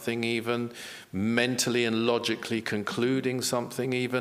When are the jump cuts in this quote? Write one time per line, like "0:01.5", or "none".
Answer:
none

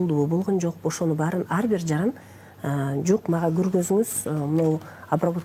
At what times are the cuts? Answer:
none

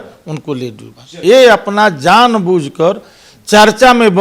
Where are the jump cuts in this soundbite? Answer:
0:01.2

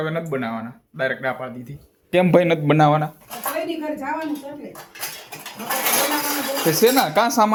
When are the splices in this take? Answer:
none

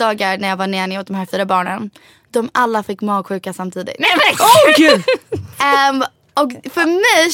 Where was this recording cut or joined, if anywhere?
none

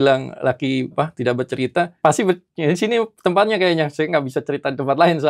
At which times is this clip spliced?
0:00.9
0:01.9

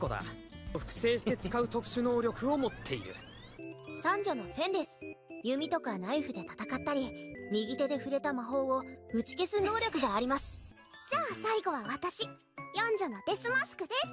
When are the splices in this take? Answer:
none

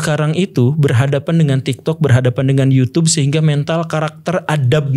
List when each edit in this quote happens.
none

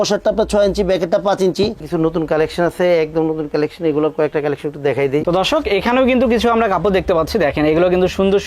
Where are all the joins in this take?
0:01.8
0:05.2

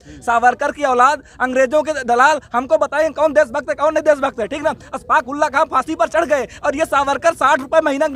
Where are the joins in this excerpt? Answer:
none

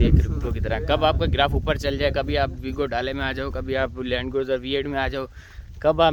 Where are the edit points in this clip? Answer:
none

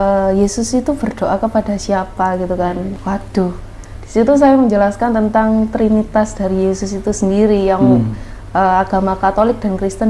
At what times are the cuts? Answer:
0:02.9

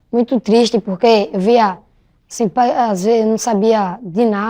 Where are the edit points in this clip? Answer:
none

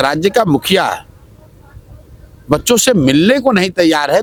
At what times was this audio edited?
none

